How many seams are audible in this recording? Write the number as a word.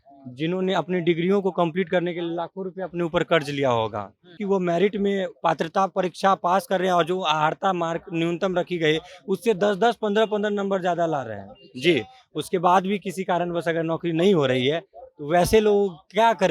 one